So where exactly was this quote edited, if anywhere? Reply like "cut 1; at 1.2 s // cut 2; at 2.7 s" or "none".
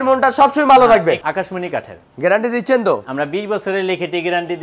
cut 1; at 1.2 s // cut 2; at 3.1 s